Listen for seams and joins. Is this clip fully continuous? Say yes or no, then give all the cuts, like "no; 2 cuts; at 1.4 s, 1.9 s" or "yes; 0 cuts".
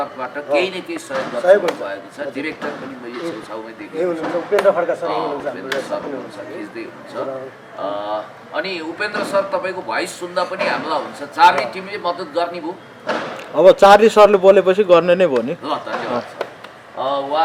yes; 0 cuts